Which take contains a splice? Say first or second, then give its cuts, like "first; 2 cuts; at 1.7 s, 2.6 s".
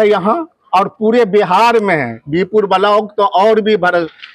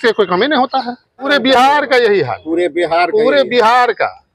second; 1 cut; at 1.3 s